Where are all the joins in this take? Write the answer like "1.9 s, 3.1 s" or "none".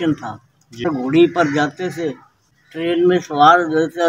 0.9 s, 2.4 s